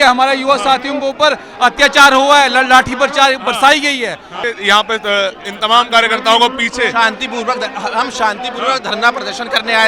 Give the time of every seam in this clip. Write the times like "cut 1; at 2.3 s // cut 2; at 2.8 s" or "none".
cut 1; at 4.3 s